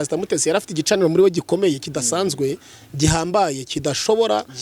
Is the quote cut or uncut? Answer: uncut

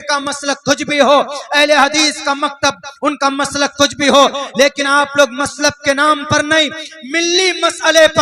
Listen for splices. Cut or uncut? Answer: uncut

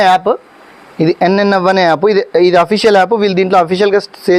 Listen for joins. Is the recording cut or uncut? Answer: uncut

